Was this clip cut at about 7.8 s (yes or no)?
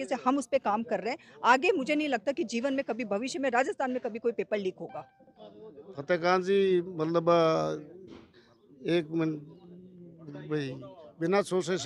no